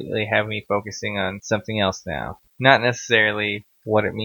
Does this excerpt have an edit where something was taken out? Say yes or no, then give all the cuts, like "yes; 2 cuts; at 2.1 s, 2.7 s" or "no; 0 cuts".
yes; 2 cuts; at 1.4 s, 2.6 s